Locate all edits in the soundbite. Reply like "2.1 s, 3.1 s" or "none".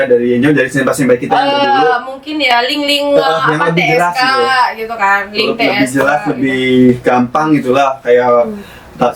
none